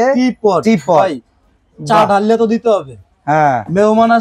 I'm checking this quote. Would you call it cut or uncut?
uncut